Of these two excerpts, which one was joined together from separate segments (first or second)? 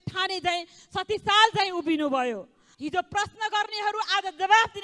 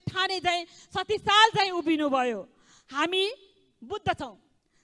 first